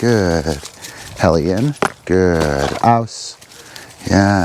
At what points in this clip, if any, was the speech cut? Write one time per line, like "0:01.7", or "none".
0:02.8